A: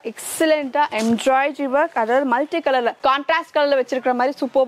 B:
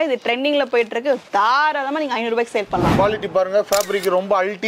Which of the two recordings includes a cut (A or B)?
B